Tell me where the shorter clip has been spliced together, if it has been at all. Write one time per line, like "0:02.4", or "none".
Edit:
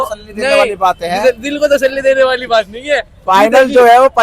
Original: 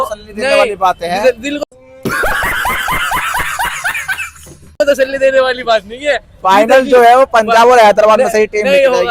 0:01.6